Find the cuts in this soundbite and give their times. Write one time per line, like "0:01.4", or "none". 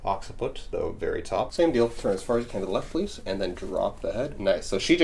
0:01.5